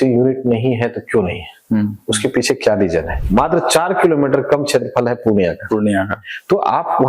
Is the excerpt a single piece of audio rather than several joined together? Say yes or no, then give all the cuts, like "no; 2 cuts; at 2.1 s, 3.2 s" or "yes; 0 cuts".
no; 1 cut; at 3.2 s